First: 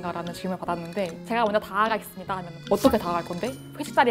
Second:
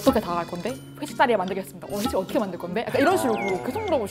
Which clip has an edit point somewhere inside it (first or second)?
first